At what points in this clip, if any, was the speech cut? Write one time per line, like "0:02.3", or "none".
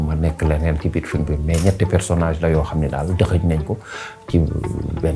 none

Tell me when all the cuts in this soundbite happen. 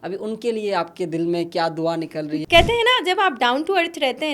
0:02.4

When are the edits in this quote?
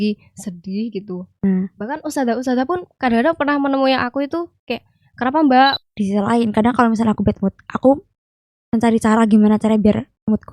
0:05.9

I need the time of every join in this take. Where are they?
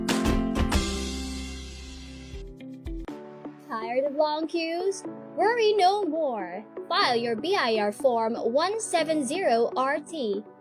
none

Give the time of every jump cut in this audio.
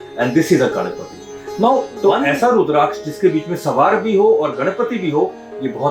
0:01.9

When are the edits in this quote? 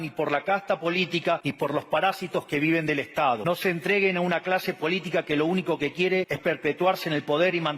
0:01.5
0:03.4
0:06.3

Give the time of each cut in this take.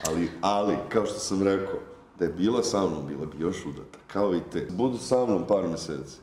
0:04.7

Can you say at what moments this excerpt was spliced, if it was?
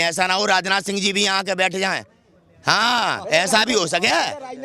none

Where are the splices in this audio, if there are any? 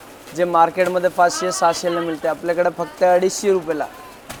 none

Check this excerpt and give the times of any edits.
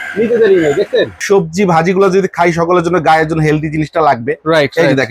0:01.1

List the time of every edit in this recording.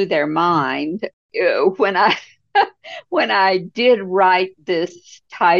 0:01.0

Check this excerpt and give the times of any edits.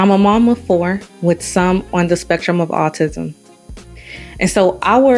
none

